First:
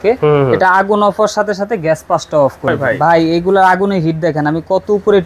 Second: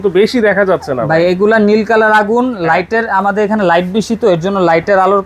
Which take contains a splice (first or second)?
first